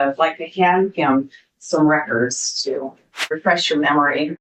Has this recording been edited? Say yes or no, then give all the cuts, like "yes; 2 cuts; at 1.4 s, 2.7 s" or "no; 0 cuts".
yes; 1 cut; at 3.4 s